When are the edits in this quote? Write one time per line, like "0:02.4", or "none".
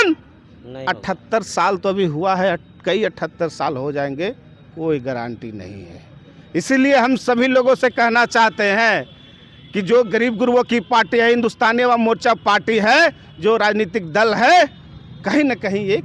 none